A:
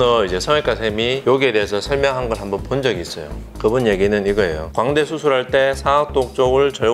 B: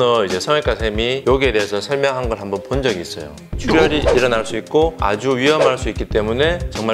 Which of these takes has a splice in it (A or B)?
B